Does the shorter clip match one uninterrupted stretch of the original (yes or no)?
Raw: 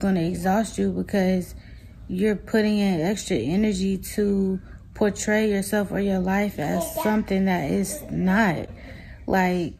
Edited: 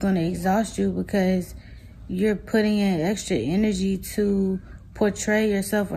yes